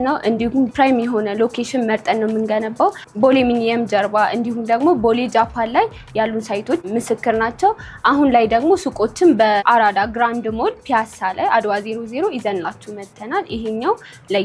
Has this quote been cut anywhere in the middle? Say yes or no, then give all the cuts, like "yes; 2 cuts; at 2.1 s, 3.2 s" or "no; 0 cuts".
no; 0 cuts